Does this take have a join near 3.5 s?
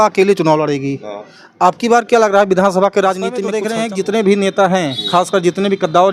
yes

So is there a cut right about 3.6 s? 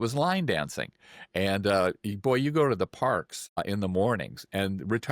yes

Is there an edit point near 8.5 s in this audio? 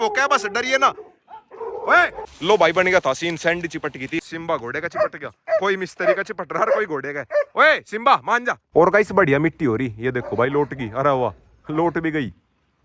yes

